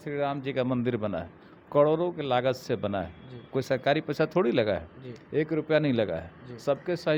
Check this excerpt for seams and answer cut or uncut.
uncut